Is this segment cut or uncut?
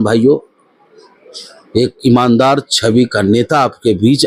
uncut